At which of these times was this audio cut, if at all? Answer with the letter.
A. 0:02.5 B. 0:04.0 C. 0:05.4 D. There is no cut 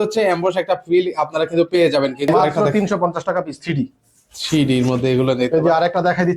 A